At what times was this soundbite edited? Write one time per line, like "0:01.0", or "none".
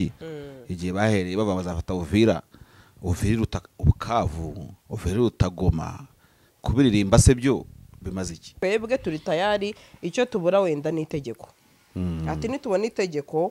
0:08.5